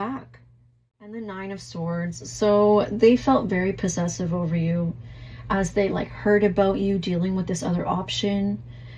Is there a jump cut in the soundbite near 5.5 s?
no; 1 cut; at 1.1 s

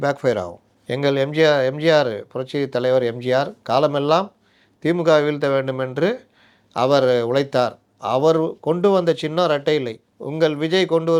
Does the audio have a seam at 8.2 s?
no; 0 cuts

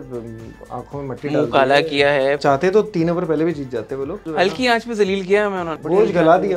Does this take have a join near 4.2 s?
yes; 3 cuts; at 2.4 s, 4.2 s, 5.7 s

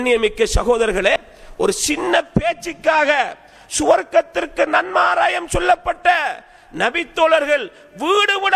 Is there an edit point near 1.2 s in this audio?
yes; 1 cut; at 1.2 s

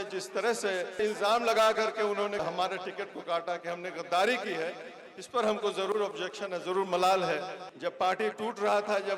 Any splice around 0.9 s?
yes; 3 cuts; at 0.9 s, 2.4 s, 7.6 s

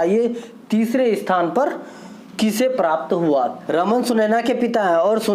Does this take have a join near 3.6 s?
yes; 1 cut; at 3.6 s

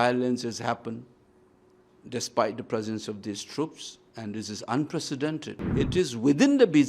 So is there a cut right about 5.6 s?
yes; 1 cut; at 5.6 s

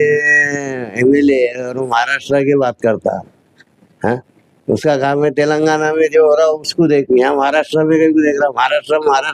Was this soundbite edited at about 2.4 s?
no; 0 cuts

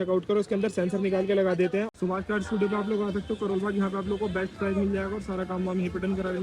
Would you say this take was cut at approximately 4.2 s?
no; 1 cut; at 1.9 s

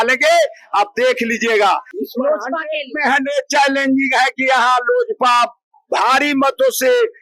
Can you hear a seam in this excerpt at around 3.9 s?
no; 1 cut; at 2.0 s

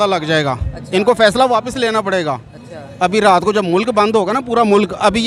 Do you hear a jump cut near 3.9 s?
no; 0 cuts

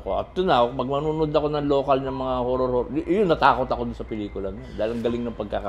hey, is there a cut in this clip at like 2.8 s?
no; 0 cuts

